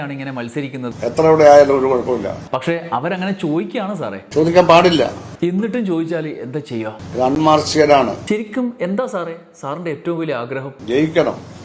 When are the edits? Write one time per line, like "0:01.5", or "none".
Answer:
0:00.9
0:07.0
0:08.2